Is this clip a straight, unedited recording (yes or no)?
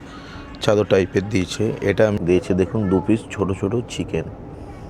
no